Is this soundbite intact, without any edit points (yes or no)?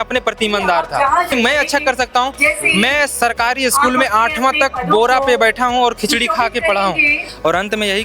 no